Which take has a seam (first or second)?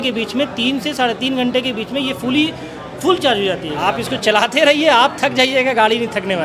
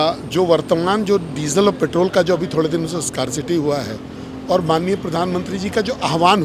first